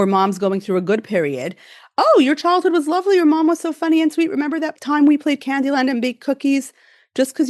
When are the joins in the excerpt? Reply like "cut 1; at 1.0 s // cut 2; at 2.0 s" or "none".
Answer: cut 1; at 4.7 s